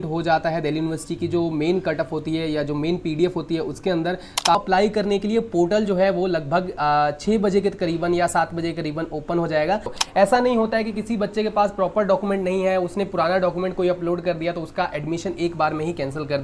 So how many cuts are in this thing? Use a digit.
2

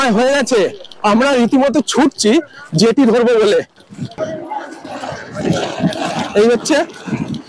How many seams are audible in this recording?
0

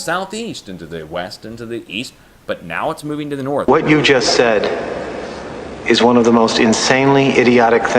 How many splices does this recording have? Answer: 2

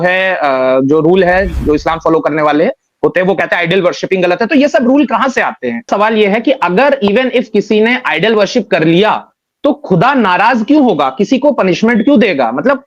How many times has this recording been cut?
1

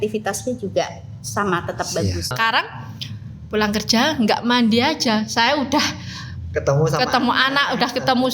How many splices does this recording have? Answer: 1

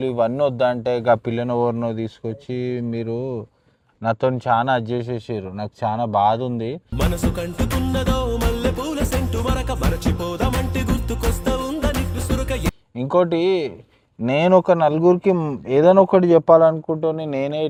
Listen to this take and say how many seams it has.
0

